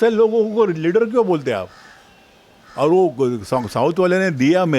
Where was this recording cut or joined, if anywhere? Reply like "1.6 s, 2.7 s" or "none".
none